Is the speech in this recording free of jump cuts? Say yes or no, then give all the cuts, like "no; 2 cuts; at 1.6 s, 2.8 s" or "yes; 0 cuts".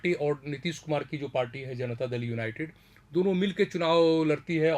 yes; 0 cuts